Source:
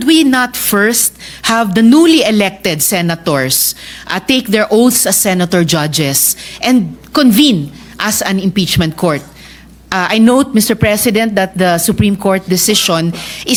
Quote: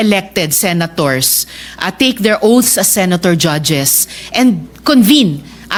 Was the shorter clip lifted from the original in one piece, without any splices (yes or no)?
yes